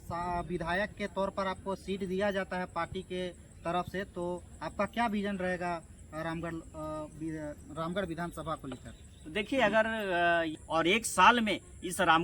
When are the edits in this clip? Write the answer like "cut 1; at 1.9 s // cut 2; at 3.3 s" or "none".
cut 1; at 10.6 s